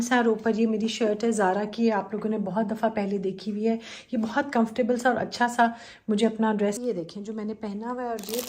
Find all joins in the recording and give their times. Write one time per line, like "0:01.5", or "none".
0:06.8